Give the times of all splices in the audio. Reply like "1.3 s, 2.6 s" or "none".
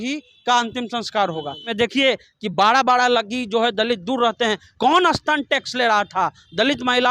1.6 s